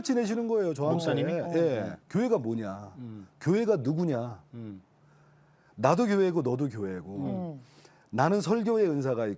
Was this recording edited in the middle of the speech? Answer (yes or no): yes